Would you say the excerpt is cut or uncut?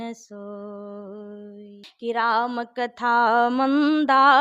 cut